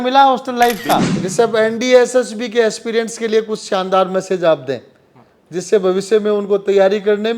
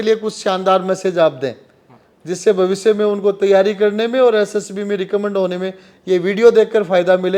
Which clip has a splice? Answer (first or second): first